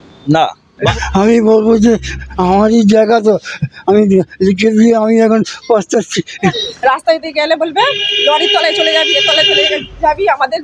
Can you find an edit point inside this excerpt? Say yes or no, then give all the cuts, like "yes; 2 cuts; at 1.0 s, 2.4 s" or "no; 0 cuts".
yes; 2 cuts; at 0.9 s, 6.6 s